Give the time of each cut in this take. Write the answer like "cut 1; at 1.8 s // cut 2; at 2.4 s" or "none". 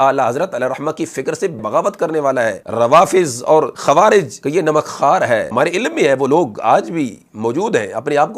cut 1; at 1.6 s // cut 2; at 2.6 s // cut 3; at 3.7 s // cut 4; at 4.4 s // cut 5; at 5.5 s